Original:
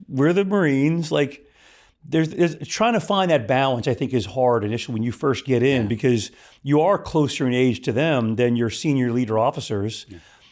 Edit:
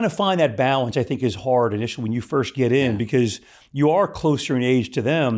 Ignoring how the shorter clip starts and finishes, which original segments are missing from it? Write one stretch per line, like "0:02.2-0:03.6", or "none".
none